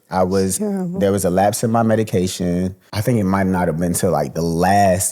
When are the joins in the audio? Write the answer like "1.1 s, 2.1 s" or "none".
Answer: 2.9 s